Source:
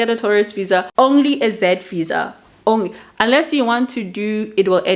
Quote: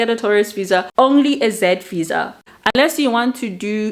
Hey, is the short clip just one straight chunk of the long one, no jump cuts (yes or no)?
no